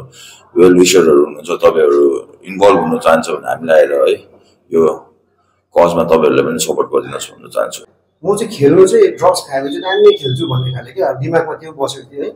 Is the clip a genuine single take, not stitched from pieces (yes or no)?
no